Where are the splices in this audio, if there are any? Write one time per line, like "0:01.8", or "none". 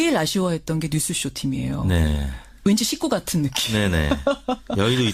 0:04.0